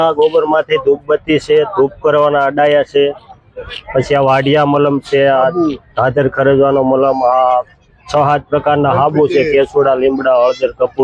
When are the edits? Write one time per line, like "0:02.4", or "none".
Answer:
none